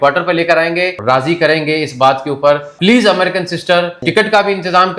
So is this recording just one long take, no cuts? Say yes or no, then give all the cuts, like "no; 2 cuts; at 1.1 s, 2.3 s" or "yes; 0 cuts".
no; 3 cuts; at 1.0 s, 2.7 s, 4.0 s